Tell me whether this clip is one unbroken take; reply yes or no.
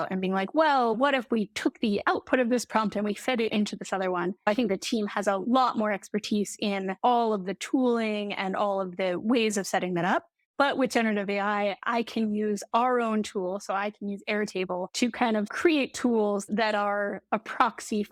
yes